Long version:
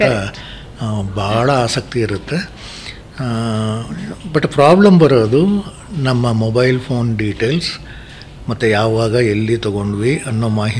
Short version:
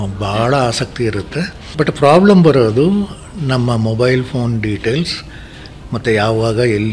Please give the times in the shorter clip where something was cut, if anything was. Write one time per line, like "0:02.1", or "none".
0:01.6